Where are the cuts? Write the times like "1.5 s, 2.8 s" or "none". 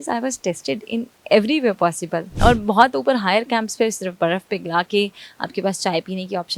2.2 s